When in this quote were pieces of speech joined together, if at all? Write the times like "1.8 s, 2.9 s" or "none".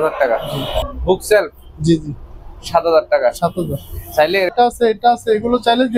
0.9 s, 4.5 s